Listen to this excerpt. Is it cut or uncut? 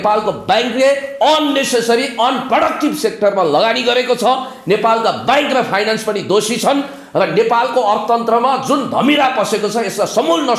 uncut